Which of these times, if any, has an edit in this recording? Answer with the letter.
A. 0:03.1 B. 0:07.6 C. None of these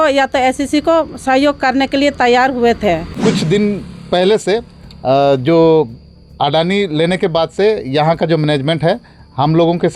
A